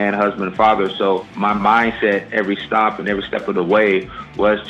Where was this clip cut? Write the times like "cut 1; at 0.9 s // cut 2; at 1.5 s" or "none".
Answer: cut 1; at 1.3 s